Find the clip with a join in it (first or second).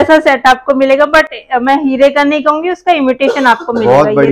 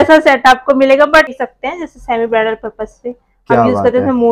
second